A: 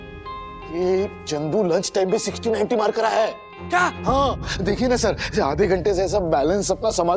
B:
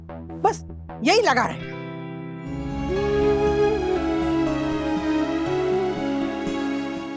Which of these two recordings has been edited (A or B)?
B